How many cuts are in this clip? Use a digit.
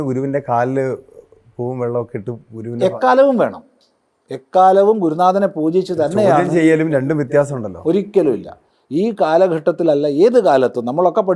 0